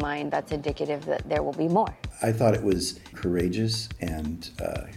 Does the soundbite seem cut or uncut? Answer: cut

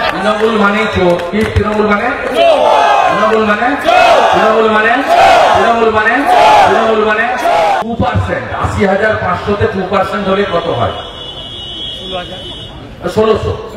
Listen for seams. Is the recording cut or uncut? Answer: cut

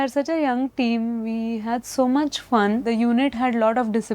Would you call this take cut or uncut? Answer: cut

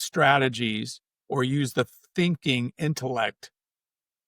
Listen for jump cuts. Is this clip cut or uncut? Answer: uncut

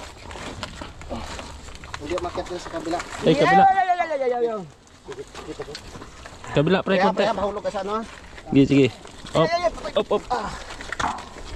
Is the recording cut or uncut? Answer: uncut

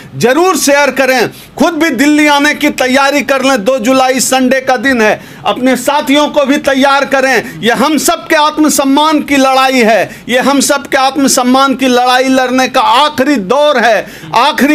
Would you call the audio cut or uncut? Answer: uncut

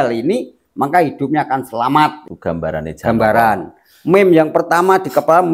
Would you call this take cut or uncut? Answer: cut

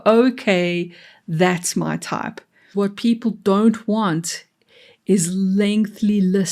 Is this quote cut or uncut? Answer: cut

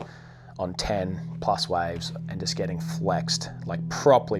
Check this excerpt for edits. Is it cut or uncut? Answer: uncut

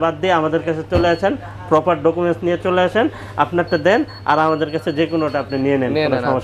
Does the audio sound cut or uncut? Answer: uncut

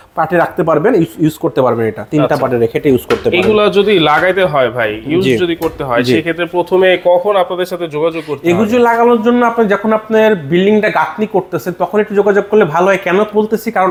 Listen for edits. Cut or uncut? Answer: uncut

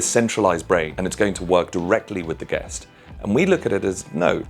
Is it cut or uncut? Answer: cut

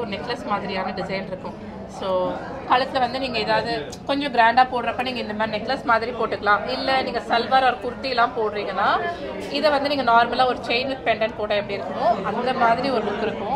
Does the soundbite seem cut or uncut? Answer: uncut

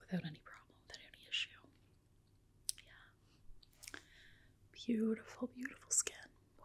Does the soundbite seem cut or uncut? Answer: uncut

